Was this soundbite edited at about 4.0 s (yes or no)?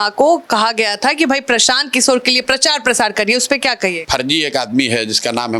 yes